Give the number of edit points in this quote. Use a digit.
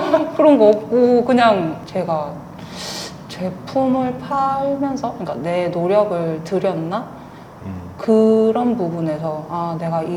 1